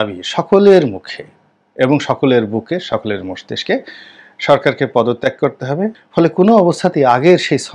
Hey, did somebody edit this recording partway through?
yes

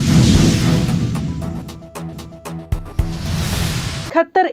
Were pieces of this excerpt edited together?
no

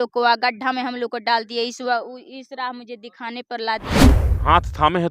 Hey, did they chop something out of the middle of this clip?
yes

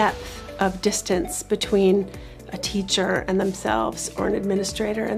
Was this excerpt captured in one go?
yes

